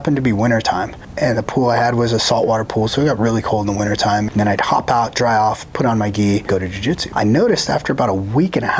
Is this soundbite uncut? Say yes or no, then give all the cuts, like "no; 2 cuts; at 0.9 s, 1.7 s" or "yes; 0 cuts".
no; 3 cuts; at 1.0 s, 4.3 s, 6.7 s